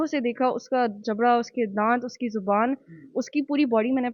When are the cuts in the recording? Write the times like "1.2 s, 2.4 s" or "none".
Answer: none